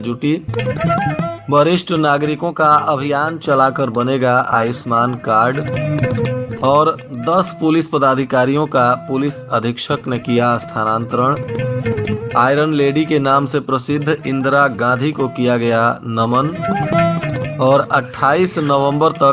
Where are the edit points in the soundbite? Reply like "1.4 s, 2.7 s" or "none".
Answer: none